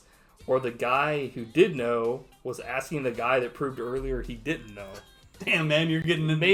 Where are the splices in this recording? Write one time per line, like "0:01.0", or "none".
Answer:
none